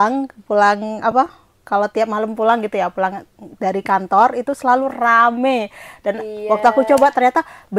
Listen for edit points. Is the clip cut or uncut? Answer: uncut